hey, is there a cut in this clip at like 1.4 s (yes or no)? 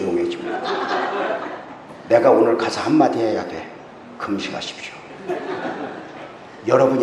no